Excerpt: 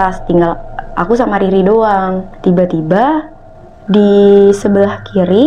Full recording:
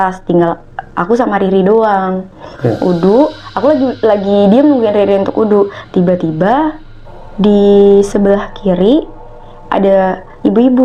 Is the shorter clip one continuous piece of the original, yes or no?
no